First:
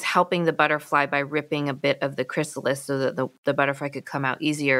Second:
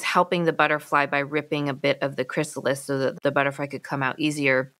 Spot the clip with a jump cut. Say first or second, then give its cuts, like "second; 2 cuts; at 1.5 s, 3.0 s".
second; 1 cut; at 3.1 s